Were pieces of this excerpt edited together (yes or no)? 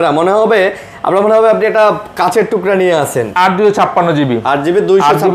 yes